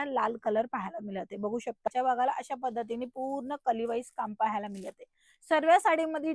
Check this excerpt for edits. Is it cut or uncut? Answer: cut